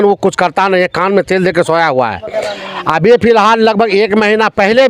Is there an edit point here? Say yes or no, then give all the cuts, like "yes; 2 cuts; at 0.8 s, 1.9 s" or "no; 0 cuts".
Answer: no; 0 cuts